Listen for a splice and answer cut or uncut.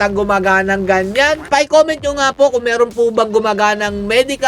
cut